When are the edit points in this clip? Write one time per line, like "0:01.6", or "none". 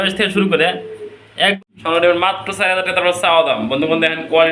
0:01.6